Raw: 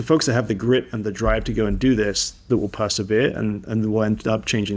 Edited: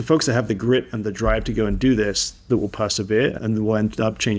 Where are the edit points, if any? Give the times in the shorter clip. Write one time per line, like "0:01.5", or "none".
0:03.4